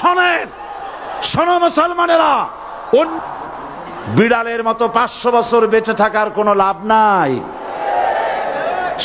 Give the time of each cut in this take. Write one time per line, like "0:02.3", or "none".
0:03.1